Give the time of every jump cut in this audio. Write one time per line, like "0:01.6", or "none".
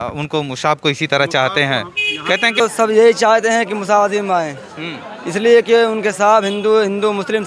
0:02.6